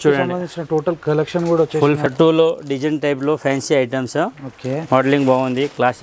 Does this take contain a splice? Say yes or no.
yes